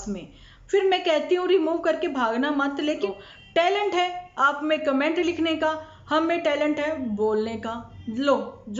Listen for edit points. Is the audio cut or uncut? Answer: cut